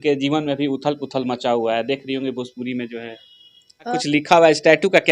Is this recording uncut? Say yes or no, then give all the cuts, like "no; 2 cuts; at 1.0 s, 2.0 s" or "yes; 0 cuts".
no; 1 cut; at 4.0 s